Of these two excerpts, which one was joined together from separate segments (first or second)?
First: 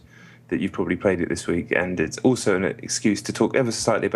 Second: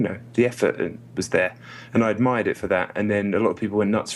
second